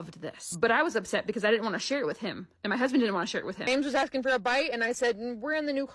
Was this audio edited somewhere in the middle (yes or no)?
no